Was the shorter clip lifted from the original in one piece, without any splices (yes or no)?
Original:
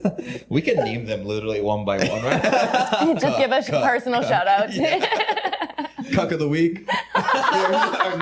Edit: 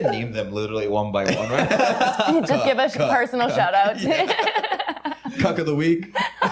yes